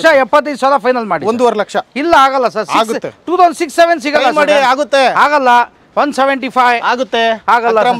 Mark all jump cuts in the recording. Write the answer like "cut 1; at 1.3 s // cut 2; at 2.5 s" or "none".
none